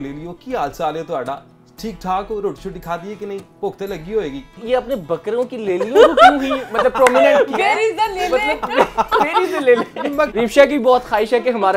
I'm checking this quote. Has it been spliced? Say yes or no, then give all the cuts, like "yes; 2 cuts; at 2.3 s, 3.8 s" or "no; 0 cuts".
yes; 2 cuts; at 4.6 s, 10.3 s